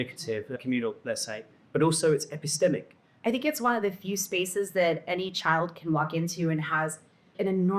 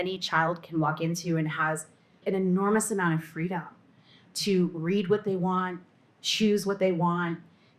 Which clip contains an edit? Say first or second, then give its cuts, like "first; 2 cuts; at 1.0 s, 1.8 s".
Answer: first; 1 cut; at 3.0 s